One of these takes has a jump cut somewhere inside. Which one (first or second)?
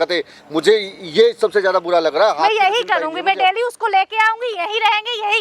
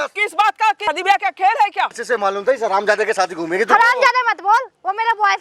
second